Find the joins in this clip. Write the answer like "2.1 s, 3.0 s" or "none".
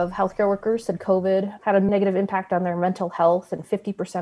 none